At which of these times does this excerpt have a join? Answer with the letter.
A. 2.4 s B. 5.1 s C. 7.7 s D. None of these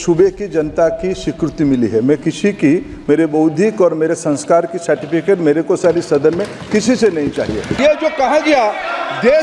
C